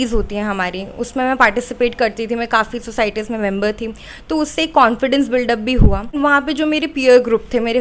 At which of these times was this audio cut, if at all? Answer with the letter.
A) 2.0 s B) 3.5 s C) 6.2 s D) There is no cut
C